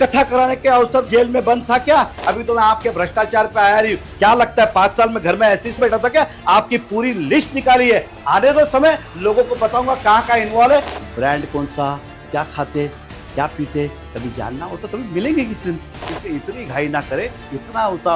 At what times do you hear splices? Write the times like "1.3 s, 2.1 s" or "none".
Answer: 1.1 s, 2.2 s, 5.8 s, 10.9 s, 16.0 s